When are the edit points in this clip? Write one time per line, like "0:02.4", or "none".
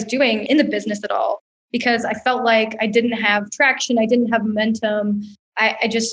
none